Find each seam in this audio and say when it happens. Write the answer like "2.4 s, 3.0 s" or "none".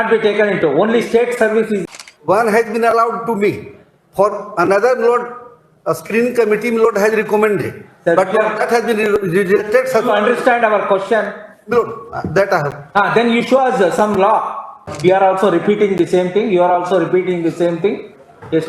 1.8 s, 14.9 s